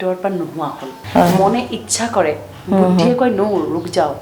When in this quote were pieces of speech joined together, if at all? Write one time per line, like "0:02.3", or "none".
0:01.0